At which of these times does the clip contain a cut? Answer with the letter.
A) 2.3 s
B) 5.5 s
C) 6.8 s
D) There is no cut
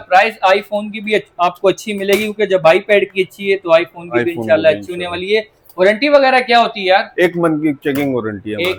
D